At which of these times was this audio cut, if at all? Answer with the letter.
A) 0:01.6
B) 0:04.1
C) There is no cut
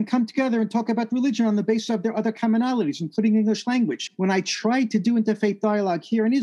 B